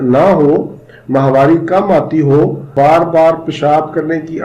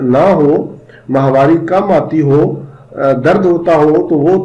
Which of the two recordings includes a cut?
first; 1 cut; at 2.7 s

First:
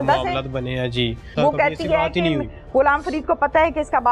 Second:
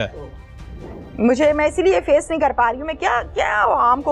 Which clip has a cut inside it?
first; 1 cut; at 1.3 s

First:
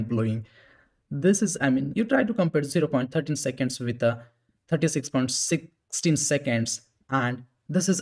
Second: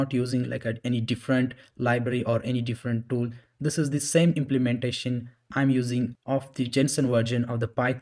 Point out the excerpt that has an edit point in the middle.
second; 1 cut; at 6.1 s

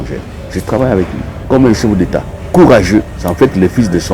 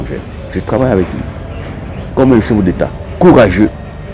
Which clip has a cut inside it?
first; 2 cuts; at 1.3 s, 3.1 s

